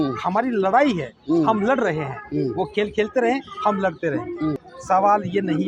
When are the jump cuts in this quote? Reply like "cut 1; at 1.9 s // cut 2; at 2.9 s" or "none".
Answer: cut 1; at 4.7 s